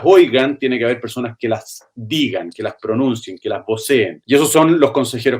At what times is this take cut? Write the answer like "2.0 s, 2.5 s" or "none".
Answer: 4.2 s